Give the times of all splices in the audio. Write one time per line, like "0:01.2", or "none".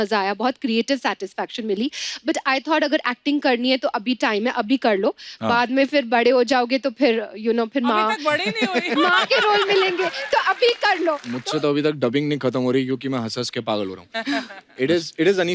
0:11.3